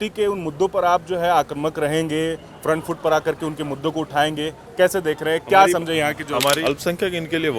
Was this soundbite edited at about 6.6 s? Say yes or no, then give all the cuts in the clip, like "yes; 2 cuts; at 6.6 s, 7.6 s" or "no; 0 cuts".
yes; 1 cut; at 6.6 s